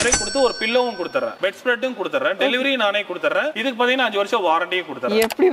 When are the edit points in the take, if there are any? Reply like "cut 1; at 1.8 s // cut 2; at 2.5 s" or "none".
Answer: none